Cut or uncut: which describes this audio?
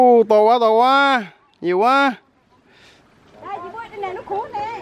uncut